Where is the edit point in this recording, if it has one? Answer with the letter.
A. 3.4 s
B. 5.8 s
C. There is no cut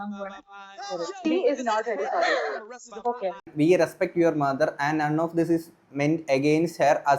A